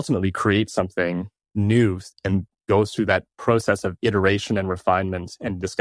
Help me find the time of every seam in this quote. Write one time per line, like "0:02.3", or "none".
0:01.5